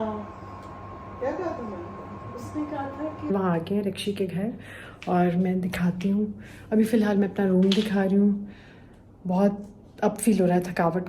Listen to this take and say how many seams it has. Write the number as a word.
one